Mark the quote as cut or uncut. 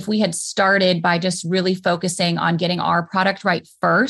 uncut